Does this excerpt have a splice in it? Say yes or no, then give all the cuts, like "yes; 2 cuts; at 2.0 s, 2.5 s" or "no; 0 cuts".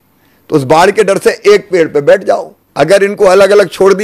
yes; 1 cut; at 2.6 s